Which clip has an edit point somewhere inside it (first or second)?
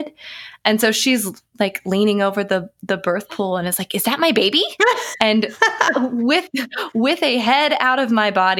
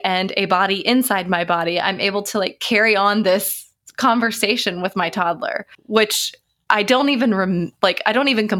second